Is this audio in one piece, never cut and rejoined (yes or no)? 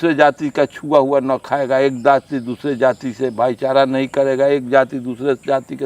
yes